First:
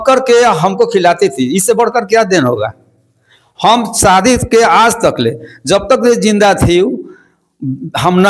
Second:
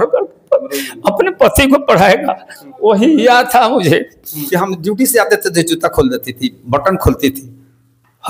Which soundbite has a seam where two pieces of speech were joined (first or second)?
second